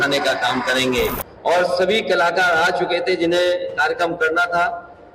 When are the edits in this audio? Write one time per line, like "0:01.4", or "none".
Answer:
0:01.3